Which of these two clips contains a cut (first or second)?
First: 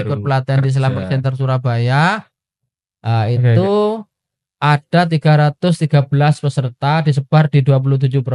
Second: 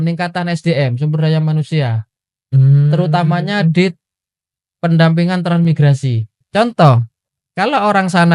second